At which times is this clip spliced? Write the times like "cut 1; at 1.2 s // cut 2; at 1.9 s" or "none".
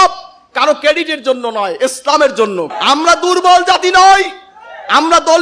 cut 1; at 2.7 s